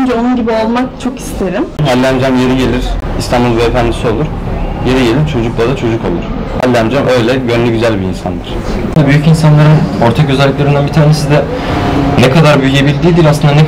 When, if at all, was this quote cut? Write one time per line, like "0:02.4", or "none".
0:01.9
0:03.1
0:08.9